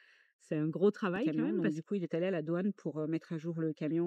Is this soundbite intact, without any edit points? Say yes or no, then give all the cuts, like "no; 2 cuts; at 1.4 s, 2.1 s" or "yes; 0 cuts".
no; 1 cut; at 1.5 s